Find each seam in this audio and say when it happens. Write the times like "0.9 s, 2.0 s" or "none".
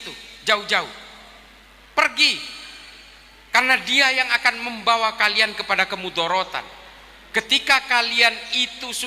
none